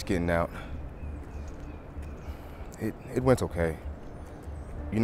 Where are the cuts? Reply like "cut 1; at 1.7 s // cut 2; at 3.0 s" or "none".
none